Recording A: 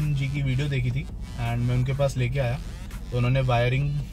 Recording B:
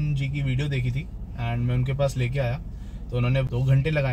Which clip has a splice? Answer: B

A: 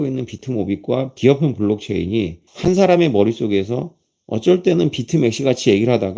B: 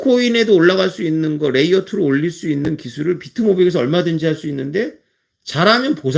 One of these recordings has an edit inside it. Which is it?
A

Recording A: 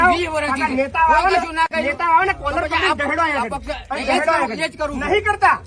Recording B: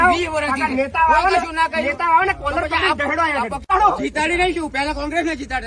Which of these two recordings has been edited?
B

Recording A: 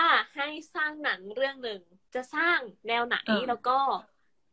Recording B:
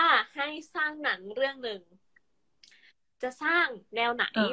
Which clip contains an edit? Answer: A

